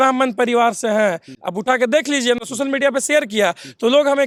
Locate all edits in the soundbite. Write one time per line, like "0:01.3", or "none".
none